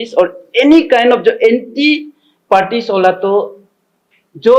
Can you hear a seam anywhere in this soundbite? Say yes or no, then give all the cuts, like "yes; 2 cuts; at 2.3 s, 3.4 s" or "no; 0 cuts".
no; 0 cuts